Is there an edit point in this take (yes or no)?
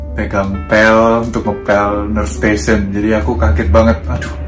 no